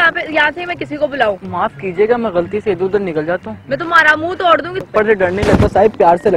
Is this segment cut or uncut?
cut